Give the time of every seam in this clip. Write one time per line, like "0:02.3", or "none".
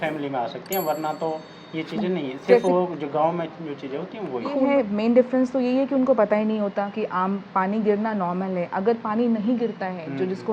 0:04.6